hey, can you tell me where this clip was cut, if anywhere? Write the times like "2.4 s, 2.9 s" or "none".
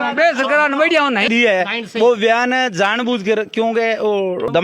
1.3 s